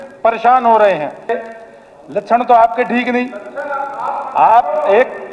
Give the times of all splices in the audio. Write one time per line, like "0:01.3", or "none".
0:01.5